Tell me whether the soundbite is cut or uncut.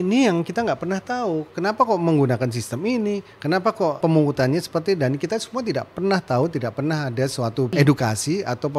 cut